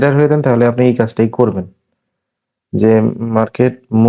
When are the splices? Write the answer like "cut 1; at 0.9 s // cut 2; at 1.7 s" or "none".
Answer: none